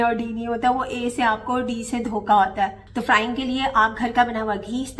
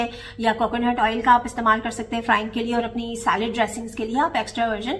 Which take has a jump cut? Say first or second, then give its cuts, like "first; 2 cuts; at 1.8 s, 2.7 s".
first; 1 cut; at 2.8 s